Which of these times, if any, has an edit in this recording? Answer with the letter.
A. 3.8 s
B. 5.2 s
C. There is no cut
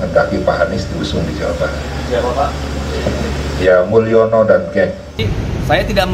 B